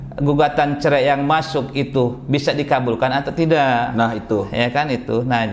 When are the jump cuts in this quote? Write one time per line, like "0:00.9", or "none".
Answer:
none